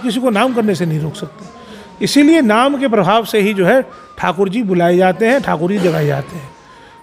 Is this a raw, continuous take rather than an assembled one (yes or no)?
yes